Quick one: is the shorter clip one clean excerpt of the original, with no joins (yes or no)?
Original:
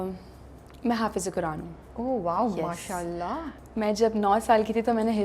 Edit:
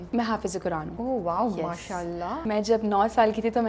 no